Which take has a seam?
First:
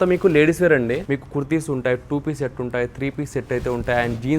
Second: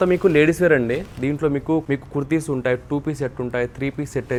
first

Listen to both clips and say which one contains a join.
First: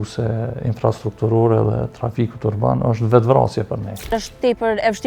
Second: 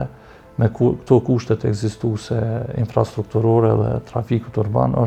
first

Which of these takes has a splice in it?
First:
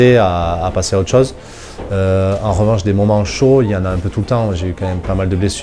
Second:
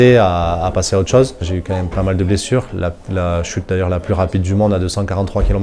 second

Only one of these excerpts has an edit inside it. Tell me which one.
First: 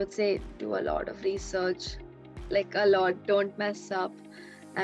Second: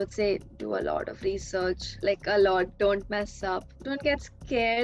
second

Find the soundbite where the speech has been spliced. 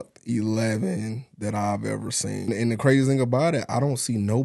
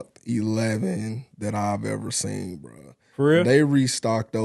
first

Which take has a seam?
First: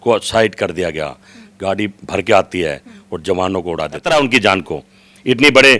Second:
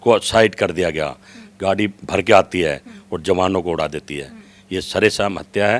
first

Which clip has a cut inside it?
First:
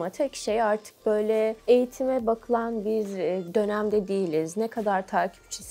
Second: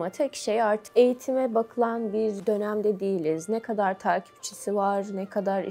second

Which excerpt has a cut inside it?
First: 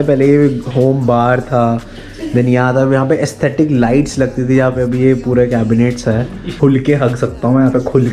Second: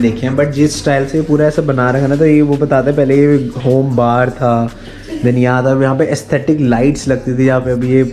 first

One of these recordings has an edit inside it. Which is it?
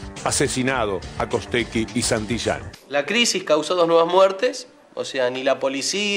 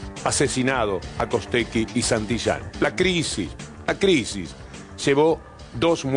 first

